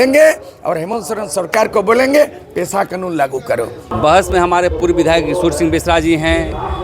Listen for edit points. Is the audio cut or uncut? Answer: cut